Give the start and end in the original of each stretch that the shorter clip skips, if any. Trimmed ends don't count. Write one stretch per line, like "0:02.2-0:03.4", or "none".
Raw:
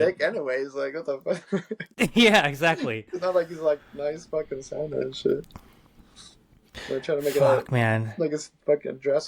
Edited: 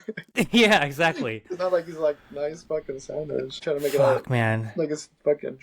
0:05.2-0:07.0